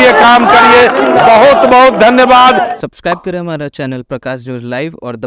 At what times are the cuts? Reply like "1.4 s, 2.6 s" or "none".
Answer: 2.7 s